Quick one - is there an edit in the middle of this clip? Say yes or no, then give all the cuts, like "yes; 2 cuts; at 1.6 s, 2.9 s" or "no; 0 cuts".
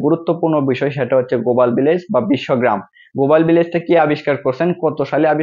no; 0 cuts